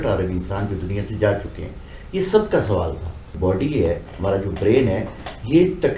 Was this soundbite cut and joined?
yes; 1 cut; at 3.3 s

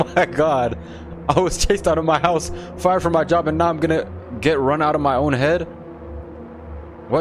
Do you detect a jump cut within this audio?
no; 0 cuts

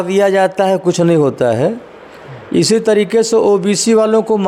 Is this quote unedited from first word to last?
yes; 0 cuts

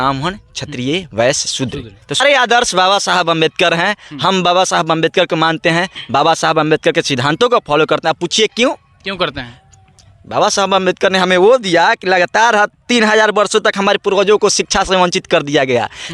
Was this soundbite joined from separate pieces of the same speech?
yes; 1 cut; at 2.2 s

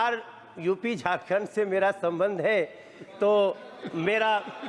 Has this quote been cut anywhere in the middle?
no; 0 cuts

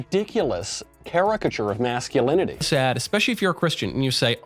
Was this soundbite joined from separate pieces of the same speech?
yes; 1 cut; at 2.6 s

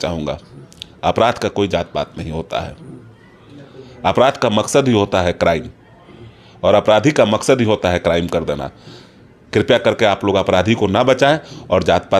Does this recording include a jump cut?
no; 0 cuts

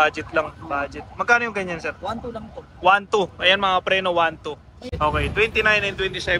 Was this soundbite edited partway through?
yes; 1 cut; at 4.8 s

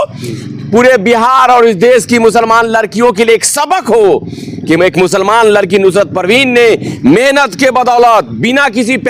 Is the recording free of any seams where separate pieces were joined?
yes; 0 cuts

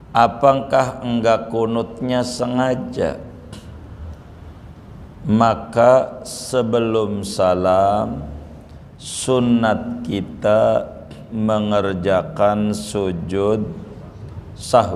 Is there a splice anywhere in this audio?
no; 0 cuts

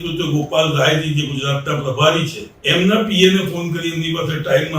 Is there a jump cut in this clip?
yes; 1 cut; at 2.5 s

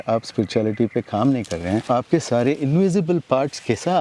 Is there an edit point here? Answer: yes; 1 cut; at 1.9 s

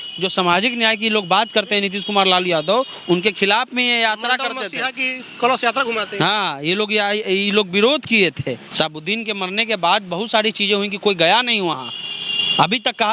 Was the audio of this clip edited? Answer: yes; 1 cut; at 8.6 s

